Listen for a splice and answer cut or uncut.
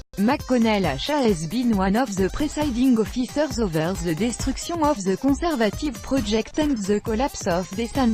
uncut